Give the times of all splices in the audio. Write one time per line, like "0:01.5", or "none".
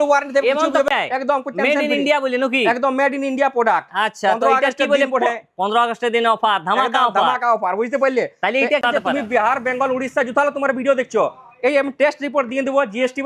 0:00.9
0:08.8

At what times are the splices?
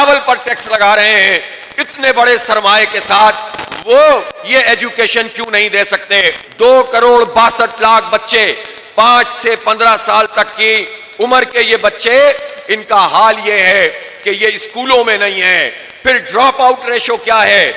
0:06.4

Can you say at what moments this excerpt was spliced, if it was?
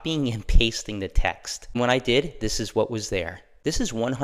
0:01.6

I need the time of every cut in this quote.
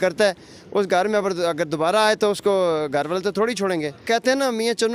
0:04.1

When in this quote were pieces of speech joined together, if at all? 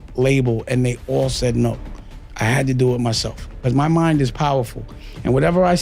0:03.6

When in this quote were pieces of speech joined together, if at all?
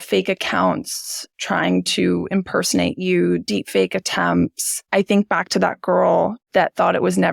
0:04.7

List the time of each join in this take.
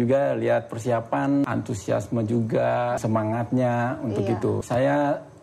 0:01.4
0:03.0
0:04.6

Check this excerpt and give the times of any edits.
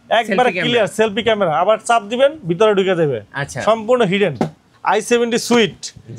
0:04.7

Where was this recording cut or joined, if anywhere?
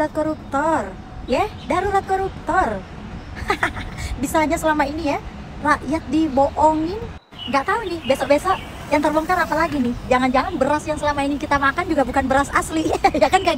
none

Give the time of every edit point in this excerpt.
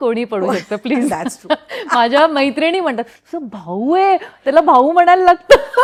none

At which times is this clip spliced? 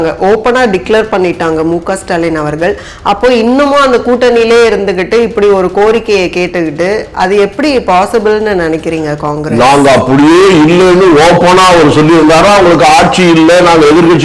none

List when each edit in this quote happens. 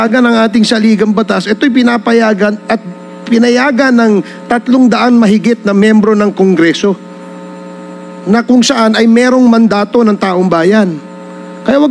none

